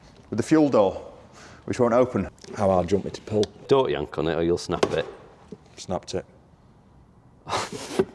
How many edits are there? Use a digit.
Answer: 2